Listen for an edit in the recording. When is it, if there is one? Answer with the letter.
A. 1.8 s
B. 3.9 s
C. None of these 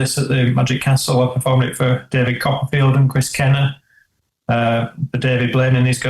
C